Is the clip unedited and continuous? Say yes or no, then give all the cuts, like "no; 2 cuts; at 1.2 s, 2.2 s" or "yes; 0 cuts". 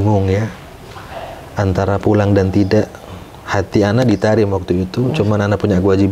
yes; 0 cuts